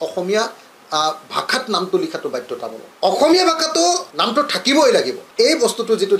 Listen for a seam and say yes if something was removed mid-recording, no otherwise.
yes